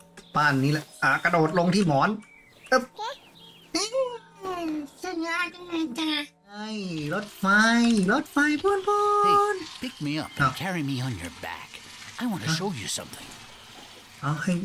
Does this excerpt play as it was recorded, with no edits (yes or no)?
no